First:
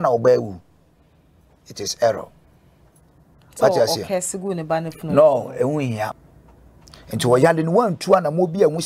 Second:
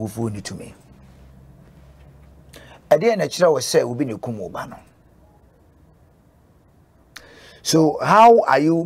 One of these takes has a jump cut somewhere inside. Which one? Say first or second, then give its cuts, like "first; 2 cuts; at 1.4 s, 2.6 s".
first; 1 cut; at 6.2 s